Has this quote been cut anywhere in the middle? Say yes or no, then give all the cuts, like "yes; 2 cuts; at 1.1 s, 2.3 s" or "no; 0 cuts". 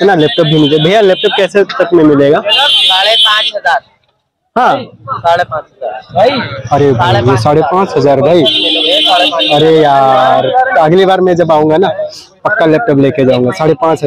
no; 0 cuts